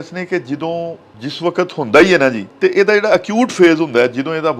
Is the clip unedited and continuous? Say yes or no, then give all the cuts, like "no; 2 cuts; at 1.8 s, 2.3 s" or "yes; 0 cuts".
no; 2 cuts; at 1.1 s, 2.5 s